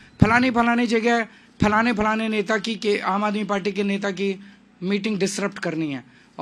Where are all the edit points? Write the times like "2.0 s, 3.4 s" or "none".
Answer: none